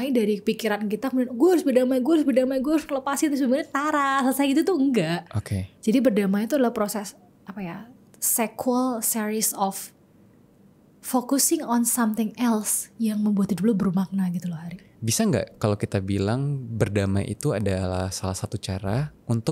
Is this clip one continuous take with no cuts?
yes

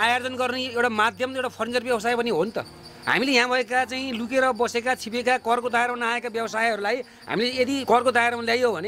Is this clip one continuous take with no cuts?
yes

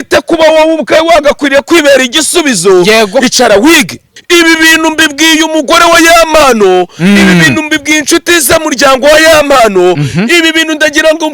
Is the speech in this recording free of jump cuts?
no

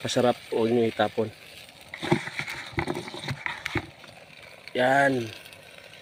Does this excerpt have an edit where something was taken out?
no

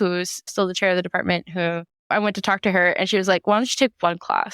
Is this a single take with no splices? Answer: no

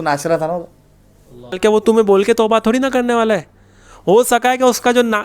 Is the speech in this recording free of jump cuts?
no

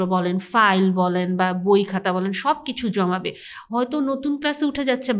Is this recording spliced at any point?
no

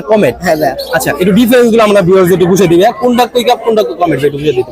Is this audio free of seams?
yes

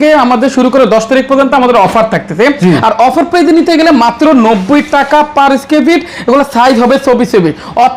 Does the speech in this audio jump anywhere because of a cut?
no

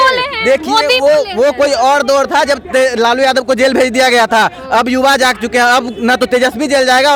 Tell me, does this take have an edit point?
no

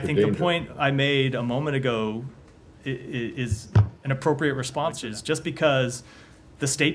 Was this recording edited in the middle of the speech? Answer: yes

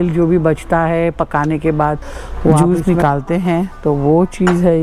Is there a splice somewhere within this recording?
yes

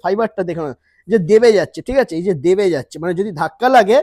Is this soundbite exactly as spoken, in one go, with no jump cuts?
yes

